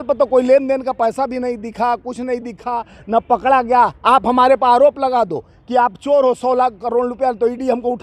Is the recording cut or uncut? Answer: uncut